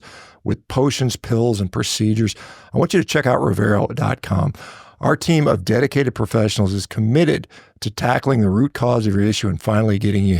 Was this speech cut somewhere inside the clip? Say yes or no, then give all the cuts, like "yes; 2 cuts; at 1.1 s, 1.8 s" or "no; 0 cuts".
no; 0 cuts